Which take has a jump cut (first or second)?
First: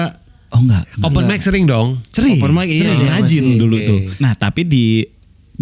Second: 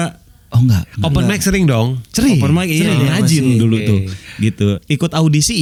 first